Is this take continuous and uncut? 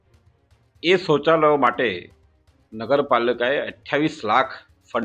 yes; 0 cuts

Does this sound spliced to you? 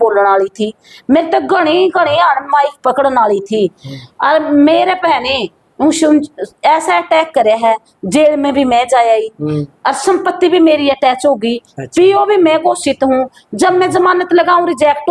no; 0 cuts

